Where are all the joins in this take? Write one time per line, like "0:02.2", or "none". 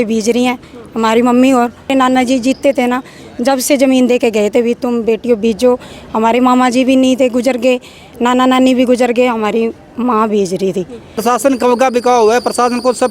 0:01.9
0:11.0